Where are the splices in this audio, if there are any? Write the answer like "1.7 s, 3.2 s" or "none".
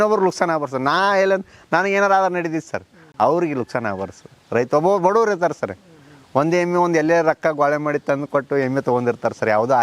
none